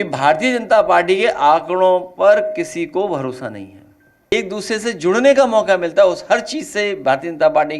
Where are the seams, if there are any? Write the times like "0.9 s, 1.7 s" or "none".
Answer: 4.3 s